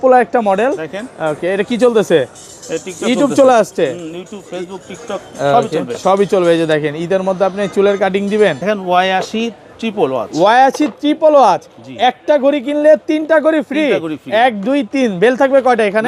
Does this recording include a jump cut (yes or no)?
yes